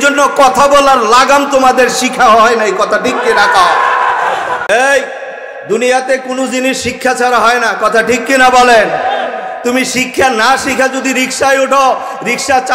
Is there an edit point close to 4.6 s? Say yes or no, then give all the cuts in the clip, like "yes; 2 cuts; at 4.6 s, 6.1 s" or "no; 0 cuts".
yes; 1 cut; at 4.6 s